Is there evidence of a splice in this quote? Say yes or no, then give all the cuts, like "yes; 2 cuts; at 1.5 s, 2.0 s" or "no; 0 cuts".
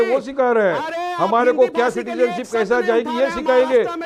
no; 0 cuts